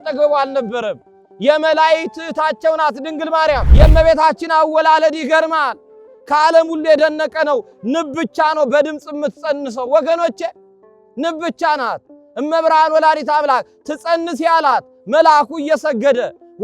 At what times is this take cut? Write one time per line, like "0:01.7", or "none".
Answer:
0:03.7